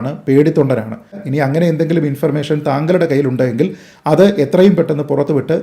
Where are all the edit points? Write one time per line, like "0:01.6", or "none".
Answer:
0:01.1